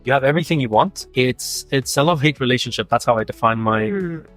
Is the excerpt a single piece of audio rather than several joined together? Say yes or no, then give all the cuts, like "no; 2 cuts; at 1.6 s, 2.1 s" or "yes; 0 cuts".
no; 1 cut; at 1.0 s